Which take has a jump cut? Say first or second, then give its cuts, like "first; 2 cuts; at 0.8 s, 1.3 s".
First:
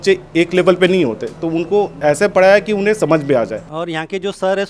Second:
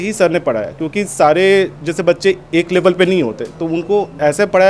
first; 1 cut; at 3.7 s